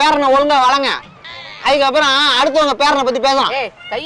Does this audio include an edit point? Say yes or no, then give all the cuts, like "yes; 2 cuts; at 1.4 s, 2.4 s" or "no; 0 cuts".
no; 0 cuts